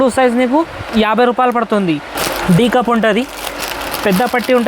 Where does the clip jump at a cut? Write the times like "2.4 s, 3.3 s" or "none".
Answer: 2.2 s